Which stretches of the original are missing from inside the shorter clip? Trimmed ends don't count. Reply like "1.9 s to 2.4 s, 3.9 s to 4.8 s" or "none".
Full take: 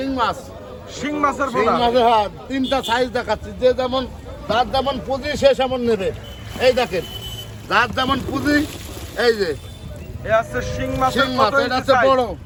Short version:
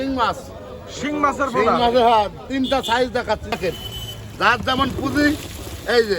3.6 s to 6.9 s